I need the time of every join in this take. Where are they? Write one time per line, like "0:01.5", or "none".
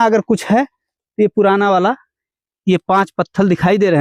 none